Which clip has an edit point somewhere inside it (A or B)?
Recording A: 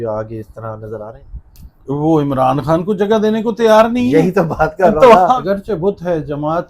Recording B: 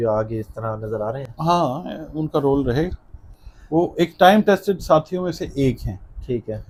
A